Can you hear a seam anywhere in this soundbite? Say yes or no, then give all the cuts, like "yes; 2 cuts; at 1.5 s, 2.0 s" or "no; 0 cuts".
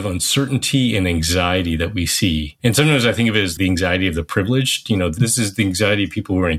yes; 2 cuts; at 2.5 s, 3.5 s